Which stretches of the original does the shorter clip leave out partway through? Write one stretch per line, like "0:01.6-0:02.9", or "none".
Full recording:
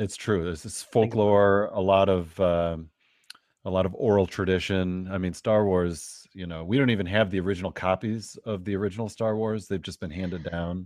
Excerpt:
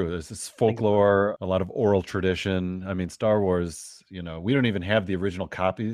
0:01.7-0:03.6

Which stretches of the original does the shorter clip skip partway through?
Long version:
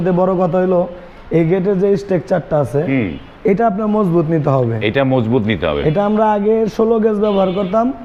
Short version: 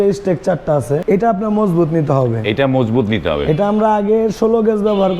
0:02.9-0:03.4

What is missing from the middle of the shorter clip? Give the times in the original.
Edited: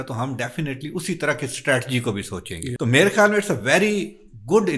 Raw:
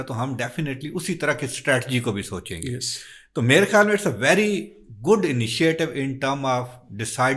0:02.7-0:03.2

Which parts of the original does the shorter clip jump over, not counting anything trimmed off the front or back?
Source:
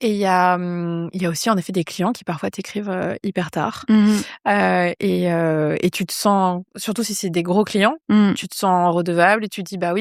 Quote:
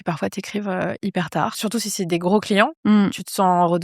0:03.8-0:06.8

